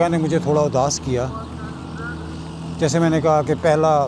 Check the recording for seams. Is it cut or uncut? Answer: uncut